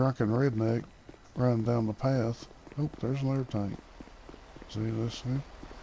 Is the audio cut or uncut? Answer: uncut